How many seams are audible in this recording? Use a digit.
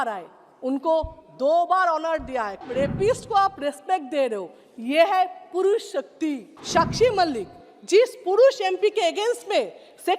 2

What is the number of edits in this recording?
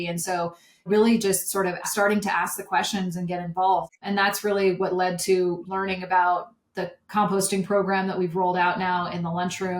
4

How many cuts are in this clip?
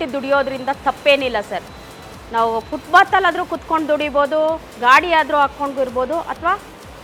0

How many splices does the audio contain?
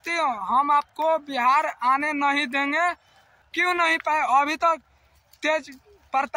1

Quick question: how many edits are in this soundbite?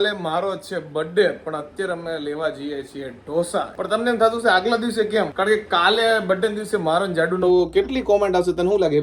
2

